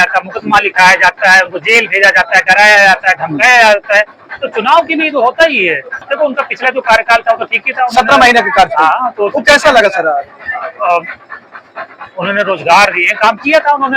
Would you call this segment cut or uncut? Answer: cut